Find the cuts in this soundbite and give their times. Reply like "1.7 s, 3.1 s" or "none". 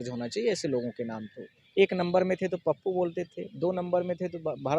1.6 s